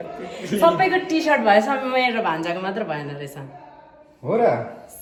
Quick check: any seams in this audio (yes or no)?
no